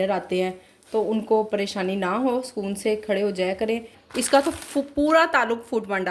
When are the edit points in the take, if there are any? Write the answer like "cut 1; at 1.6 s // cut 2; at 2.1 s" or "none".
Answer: cut 1; at 4.0 s